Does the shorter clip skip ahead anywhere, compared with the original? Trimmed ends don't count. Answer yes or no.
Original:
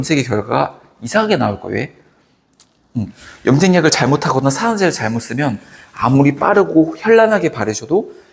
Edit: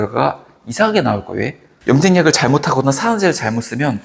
yes